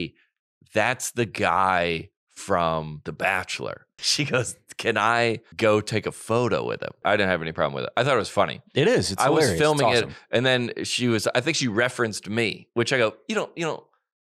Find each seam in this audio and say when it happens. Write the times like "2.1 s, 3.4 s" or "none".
3.0 s, 4.0 s, 5.5 s, 7.0 s